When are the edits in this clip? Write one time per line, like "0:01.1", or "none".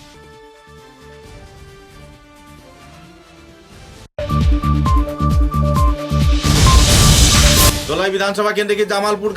0:04.1
0:07.7